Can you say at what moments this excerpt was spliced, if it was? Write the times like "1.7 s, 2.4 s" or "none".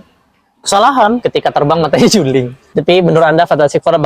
2.6 s